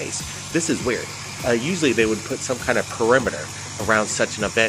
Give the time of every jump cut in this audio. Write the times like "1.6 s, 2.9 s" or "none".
none